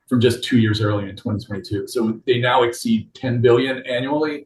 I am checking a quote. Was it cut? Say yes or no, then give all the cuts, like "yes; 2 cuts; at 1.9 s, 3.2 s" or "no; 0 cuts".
no; 0 cuts